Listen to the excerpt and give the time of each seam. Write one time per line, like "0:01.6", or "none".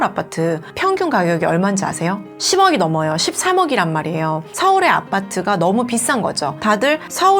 none